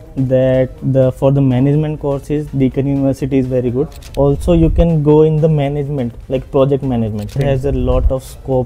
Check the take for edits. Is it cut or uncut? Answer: cut